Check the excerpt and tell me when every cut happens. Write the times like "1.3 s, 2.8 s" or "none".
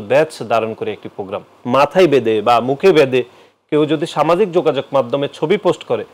1.5 s